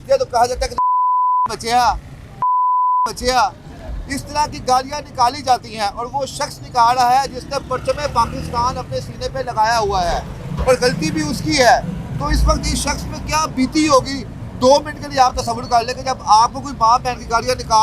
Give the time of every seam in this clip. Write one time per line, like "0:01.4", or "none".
none